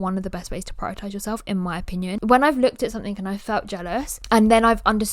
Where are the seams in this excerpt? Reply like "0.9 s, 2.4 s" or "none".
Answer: 2.1 s